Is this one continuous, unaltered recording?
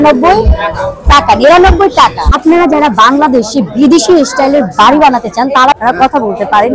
no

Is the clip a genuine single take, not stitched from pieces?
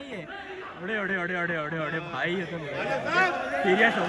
yes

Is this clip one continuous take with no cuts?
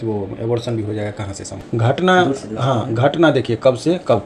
no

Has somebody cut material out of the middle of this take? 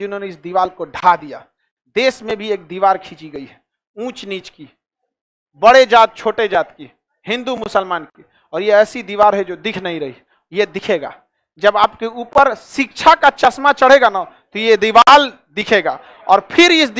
no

